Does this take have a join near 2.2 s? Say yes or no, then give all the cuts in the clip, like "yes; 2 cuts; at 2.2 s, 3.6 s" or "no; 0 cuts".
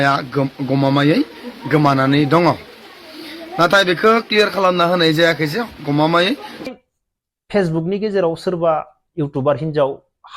no; 1 cut; at 6.7 s